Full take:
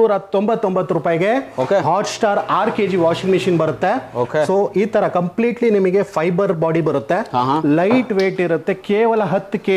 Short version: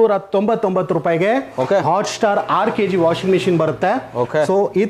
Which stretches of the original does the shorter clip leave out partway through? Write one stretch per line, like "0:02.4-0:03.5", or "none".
none